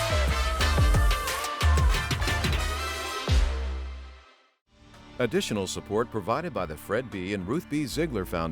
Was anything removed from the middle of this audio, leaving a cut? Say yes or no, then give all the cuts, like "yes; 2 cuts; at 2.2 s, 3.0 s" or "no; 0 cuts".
yes; 1 cut; at 5.1 s